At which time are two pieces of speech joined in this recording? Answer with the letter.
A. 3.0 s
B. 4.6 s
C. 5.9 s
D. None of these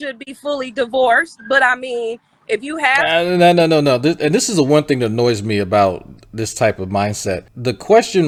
D